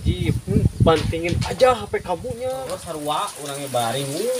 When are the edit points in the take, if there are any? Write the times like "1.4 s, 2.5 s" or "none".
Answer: 2.7 s